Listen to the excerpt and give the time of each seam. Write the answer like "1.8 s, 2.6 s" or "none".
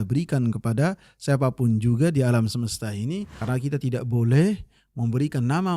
3.3 s